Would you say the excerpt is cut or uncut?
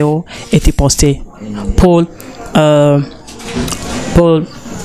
uncut